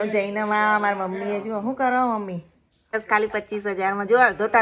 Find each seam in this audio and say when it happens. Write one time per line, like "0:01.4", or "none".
0:02.9